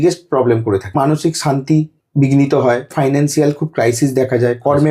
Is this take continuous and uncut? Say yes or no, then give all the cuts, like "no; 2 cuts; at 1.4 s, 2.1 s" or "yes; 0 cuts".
no; 3 cuts; at 1.0 s, 2.0 s, 2.9 s